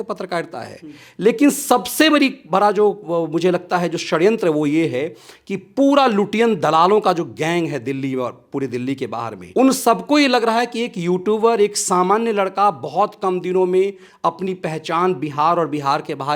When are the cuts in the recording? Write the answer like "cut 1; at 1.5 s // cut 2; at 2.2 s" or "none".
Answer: cut 1; at 9.4 s